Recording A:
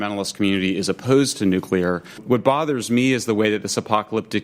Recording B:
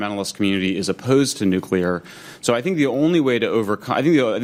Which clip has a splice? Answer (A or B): A